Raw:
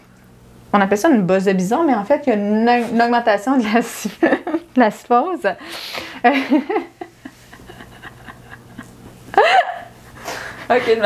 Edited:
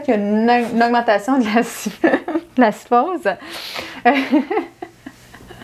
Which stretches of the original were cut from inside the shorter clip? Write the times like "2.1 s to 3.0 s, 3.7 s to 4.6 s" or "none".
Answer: none

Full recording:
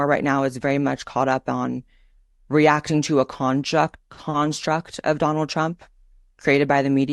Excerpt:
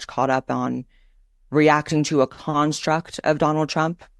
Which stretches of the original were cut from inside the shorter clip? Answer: 3.3 s to 4.2 s

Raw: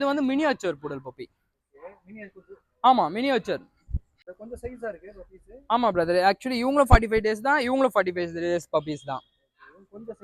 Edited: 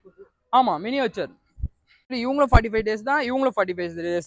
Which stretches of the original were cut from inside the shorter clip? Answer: 4.4 s to 6.4 s

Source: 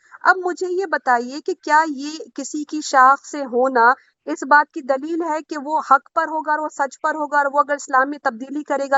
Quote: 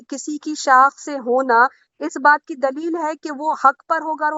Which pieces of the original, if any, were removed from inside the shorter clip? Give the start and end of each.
none

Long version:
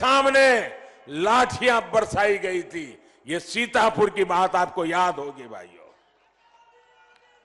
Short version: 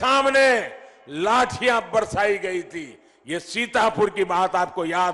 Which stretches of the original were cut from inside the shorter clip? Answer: none

